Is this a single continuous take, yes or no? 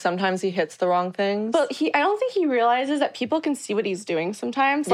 yes